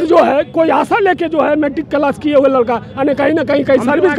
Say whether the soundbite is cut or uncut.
uncut